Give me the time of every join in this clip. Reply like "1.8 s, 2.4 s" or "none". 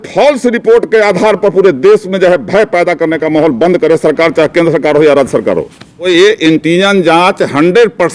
6.1 s